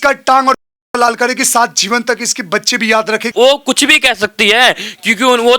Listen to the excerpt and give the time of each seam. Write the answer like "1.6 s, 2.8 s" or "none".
3.3 s

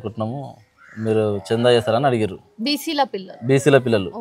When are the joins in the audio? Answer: none

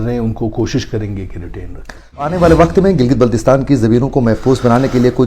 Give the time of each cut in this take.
2.3 s

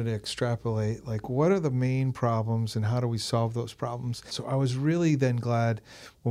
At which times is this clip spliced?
4.3 s

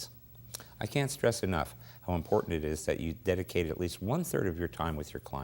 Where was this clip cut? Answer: 2.1 s

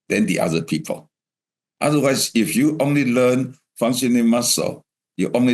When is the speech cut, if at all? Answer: none

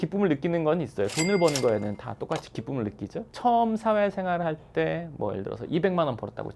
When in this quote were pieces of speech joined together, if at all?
3.3 s

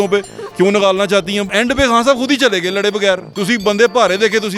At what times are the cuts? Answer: 1.5 s, 3.3 s

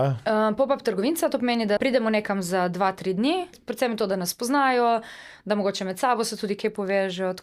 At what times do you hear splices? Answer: 1.8 s, 3.6 s

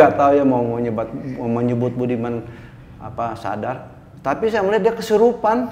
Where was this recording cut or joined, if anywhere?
none

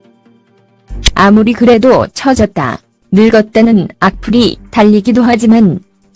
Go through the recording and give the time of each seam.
4.9 s

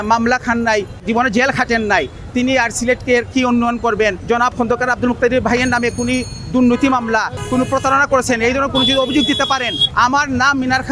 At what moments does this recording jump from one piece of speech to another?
1.0 s, 4.2 s, 7.4 s, 9.8 s

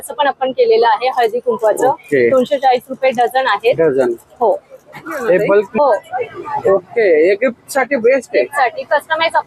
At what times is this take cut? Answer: 5.7 s

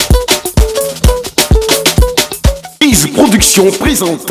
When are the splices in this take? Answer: 1.1 s

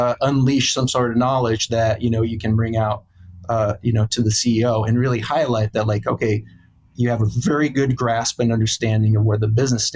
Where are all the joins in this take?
none

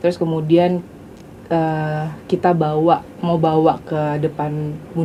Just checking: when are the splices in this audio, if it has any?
none

